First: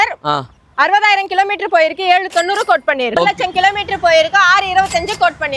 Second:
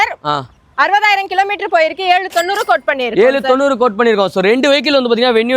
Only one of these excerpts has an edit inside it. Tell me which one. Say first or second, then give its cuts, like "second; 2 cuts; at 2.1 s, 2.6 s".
first; 1 cut; at 3.2 s